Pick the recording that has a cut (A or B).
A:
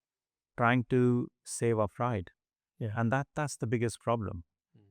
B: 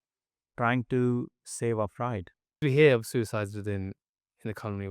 B